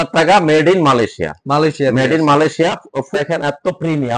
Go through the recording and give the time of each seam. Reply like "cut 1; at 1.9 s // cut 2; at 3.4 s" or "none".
cut 1; at 3.1 s